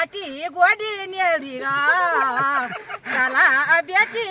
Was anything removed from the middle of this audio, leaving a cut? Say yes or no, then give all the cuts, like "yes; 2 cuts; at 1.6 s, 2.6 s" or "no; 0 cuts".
no; 0 cuts